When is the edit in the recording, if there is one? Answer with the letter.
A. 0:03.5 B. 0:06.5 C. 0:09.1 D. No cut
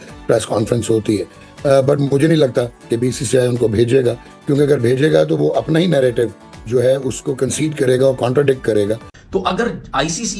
C